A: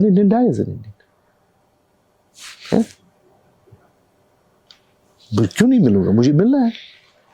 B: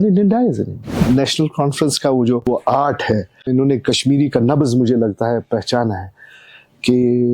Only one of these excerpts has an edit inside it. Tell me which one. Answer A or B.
B